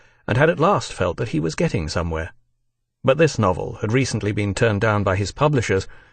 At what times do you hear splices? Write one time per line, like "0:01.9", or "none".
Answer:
0:03.9